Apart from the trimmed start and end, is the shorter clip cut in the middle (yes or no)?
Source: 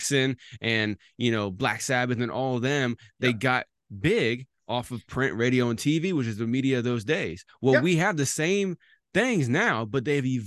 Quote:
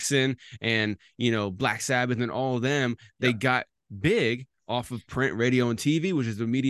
no